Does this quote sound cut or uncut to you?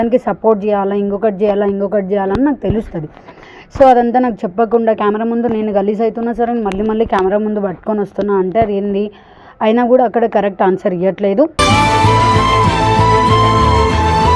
uncut